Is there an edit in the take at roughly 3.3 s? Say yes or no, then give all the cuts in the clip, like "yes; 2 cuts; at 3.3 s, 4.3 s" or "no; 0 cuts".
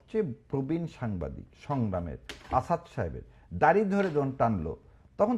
no; 1 cut; at 1.5 s